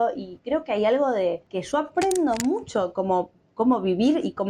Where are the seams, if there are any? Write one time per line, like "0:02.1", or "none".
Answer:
0:01.4